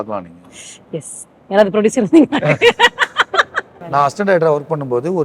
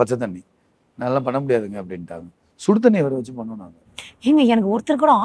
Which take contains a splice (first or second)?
first